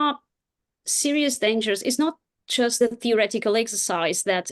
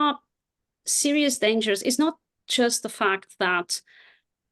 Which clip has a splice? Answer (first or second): first